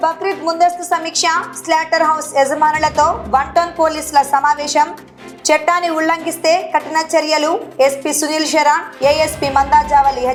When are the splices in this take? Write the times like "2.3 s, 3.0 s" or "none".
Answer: none